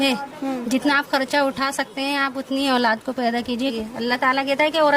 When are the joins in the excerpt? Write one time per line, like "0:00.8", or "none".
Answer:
0:03.7